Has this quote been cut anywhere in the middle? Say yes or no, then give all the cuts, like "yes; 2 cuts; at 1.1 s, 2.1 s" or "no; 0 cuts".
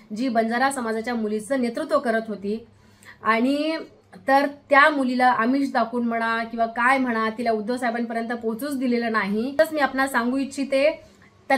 yes; 1 cut; at 9.5 s